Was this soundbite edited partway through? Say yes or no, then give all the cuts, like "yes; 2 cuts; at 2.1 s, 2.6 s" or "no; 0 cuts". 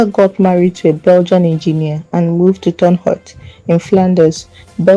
yes; 1 cut; at 3.9 s